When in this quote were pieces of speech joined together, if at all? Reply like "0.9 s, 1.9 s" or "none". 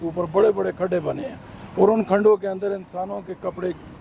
none